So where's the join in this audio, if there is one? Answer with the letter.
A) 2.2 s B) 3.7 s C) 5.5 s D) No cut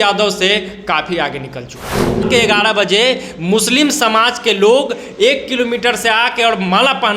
A